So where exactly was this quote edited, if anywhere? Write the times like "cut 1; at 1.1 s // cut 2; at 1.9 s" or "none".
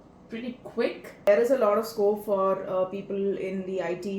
cut 1; at 1.3 s